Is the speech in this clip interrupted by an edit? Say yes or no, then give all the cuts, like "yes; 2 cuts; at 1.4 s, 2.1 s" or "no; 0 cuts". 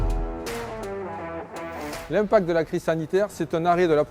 yes; 2 cuts; at 1.1 s, 1.9 s